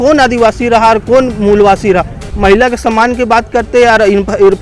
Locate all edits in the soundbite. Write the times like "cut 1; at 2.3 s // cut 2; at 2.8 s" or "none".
cut 1; at 2.2 s